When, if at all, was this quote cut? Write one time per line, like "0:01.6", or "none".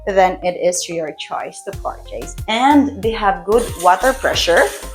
0:02.3